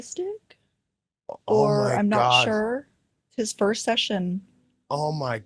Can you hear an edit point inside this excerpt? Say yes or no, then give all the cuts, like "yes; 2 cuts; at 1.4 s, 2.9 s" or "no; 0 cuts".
yes; 1 cut; at 3.3 s